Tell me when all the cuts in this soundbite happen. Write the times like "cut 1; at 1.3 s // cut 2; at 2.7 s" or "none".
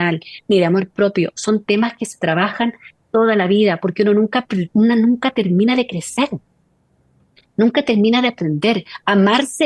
none